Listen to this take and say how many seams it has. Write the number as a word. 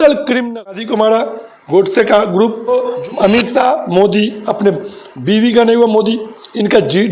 two